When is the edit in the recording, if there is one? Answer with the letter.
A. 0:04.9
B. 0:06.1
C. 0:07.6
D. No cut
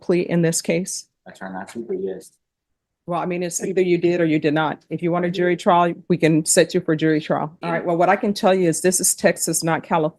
C